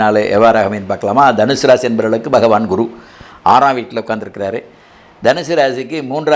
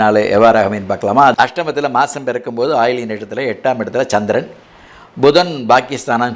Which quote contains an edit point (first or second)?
second